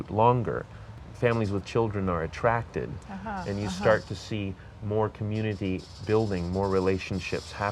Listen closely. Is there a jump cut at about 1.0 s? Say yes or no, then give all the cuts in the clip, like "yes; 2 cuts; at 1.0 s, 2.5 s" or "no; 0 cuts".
yes; 1 cut; at 1.0 s